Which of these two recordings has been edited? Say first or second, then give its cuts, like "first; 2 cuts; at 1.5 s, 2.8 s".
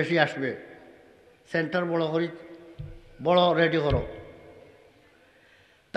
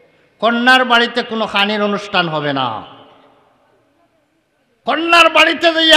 second; 1 cut; at 4.7 s